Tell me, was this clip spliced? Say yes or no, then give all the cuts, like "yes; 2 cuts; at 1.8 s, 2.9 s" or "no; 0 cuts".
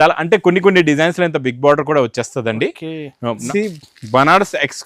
yes; 1 cut; at 3.4 s